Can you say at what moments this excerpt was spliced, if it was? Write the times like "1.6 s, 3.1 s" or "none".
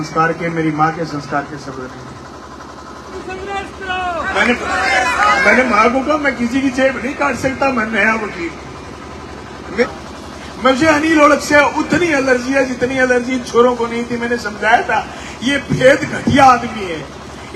3.2 s, 9.8 s